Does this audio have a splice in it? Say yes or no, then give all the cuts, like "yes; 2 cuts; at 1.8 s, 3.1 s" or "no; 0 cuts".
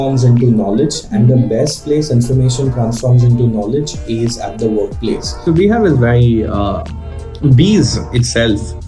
yes; 1 cut; at 5.4 s